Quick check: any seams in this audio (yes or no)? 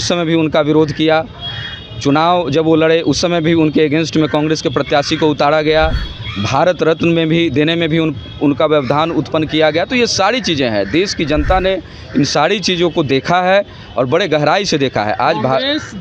no